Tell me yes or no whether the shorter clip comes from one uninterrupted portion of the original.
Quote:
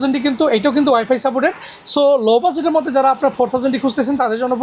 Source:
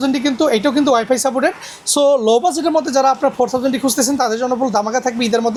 yes